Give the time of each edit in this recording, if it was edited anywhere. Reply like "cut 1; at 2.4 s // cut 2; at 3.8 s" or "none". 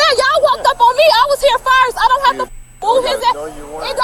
none